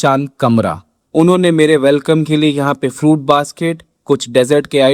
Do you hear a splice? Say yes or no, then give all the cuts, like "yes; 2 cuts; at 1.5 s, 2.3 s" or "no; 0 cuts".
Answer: yes; 1 cut; at 1.0 s